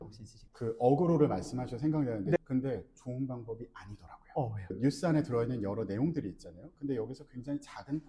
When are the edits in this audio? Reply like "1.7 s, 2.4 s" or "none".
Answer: 2.4 s